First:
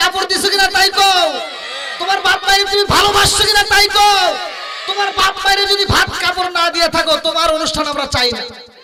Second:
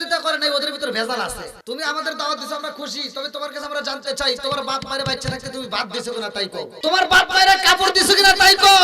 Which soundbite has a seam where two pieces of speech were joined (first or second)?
second